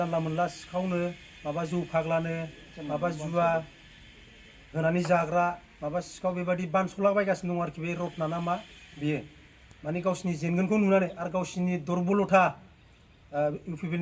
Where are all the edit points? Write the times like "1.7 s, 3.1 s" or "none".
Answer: none

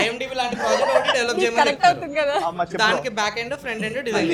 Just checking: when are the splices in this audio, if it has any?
none

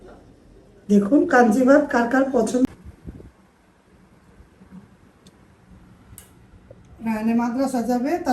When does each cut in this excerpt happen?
2.6 s

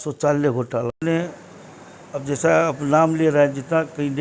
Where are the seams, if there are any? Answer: 1.0 s

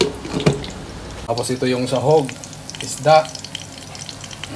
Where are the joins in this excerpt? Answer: 1.3 s

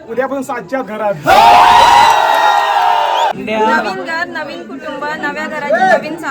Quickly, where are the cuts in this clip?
3.3 s

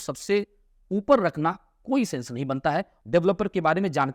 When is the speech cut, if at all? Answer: 2.9 s

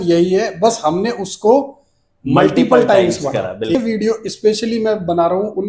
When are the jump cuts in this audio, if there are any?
3.7 s

